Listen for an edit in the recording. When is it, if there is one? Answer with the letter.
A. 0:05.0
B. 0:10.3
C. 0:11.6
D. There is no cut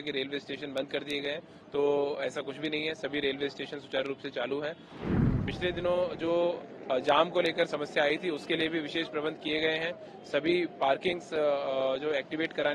A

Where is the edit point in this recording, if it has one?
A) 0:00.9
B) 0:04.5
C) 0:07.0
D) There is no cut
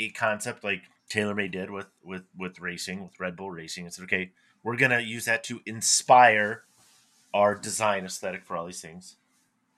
A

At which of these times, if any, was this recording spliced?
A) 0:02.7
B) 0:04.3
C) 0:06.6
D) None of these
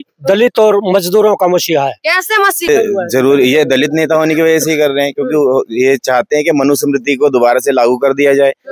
A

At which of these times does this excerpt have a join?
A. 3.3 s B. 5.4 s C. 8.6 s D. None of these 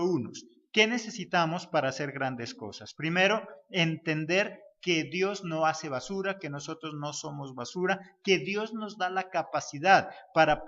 A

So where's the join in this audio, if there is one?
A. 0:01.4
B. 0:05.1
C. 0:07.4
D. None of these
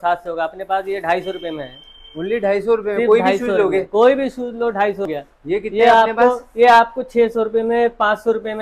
B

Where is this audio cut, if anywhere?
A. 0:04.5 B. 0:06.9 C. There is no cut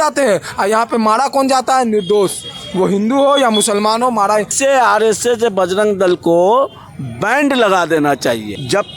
A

